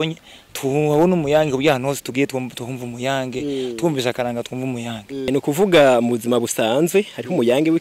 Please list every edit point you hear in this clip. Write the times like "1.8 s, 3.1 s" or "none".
5.3 s